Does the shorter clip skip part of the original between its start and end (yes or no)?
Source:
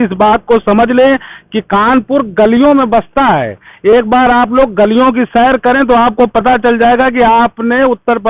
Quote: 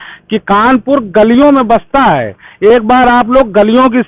no